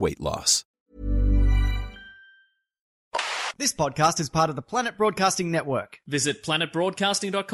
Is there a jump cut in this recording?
yes; 1 cut; at 3.1 s

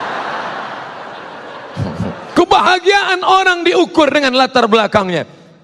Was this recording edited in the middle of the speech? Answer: yes; 1 cut; at 2.3 s

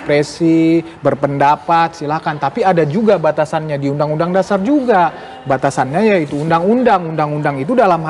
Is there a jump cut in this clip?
no; 0 cuts

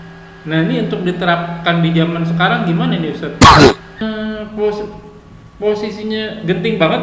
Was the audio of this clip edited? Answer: yes; 1 cut; at 4.0 s

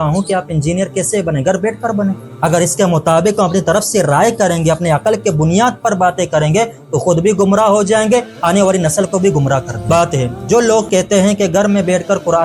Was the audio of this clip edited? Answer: yes; 2 cuts; at 2.3 s, 9.9 s

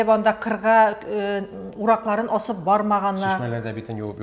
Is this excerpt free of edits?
yes; 0 cuts

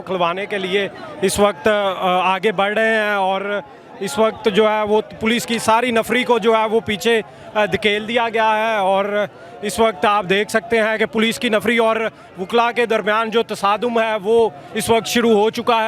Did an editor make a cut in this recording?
no; 0 cuts

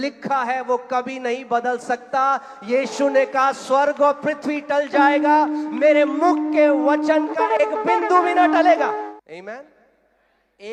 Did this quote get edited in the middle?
yes; 1 cut; at 9.1 s

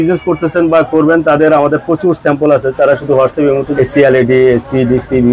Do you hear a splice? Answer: yes; 1 cut; at 3.7 s

